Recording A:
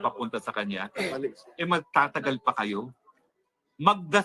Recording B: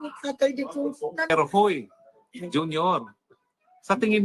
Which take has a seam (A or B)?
B